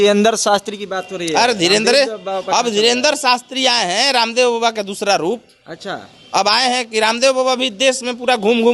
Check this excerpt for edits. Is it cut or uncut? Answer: uncut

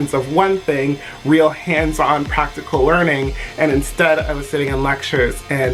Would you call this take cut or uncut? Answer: uncut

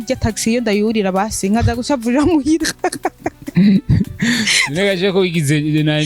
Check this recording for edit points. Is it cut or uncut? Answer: uncut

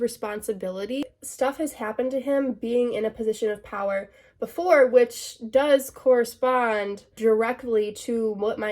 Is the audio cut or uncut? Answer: cut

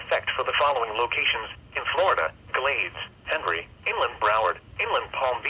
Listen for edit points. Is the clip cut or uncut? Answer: cut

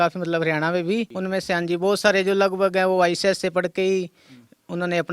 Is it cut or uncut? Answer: cut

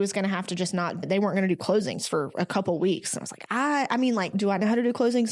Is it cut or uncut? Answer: cut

